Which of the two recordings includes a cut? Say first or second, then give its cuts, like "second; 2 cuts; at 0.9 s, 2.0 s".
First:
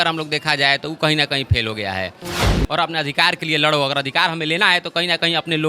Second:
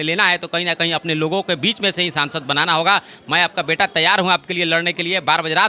first; 1 cut; at 2.5 s